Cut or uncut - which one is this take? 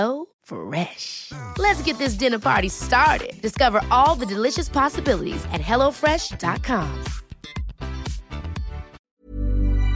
cut